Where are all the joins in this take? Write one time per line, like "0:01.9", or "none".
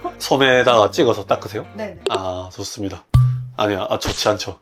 none